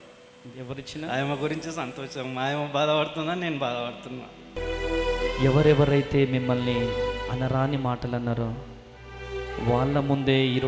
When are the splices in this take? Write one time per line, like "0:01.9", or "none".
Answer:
0:04.5